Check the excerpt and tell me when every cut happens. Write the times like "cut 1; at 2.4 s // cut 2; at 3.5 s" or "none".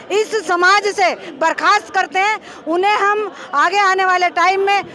none